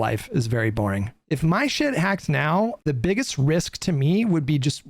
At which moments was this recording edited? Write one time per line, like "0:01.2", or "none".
0:01.1
0:02.8

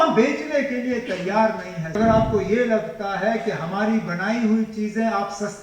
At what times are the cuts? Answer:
0:02.0

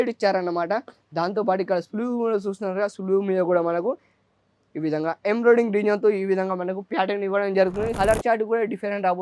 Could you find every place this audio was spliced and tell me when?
0:07.9

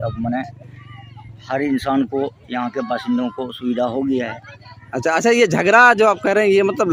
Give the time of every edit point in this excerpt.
none

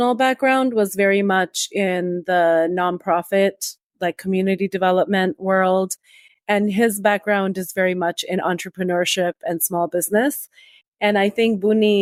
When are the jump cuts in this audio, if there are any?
none

